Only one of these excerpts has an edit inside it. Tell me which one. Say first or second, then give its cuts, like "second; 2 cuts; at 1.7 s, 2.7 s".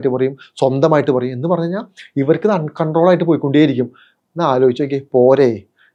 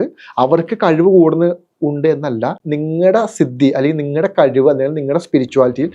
second; 1 cut; at 2.6 s